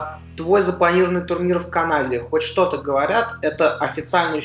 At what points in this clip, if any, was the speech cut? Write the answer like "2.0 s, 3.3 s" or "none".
none